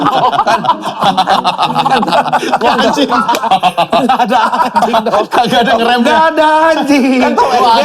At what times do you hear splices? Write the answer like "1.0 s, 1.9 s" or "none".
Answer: none